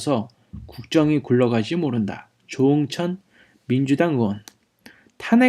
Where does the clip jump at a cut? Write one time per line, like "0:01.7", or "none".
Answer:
0:00.9